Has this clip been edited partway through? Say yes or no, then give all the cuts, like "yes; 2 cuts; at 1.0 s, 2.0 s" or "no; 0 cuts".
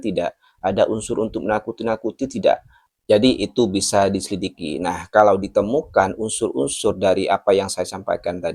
no; 0 cuts